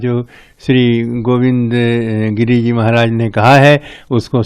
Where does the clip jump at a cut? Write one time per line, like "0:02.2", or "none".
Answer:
none

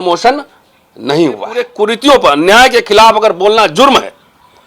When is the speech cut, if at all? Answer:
0:01.7

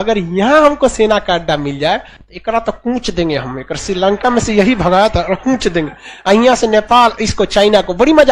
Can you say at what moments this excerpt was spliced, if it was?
none

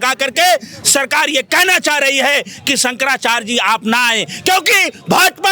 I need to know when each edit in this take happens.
none

